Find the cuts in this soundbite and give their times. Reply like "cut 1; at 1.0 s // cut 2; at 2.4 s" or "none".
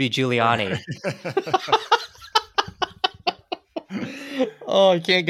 none